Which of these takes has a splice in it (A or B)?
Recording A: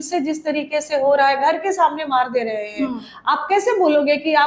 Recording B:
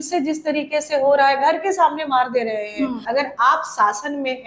B